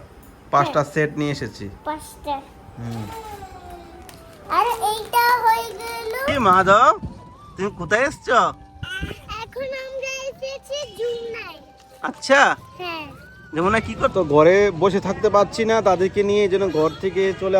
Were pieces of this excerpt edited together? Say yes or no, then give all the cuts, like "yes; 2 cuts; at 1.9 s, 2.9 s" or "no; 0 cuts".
yes; 2 cuts; at 6.2 s, 14.1 s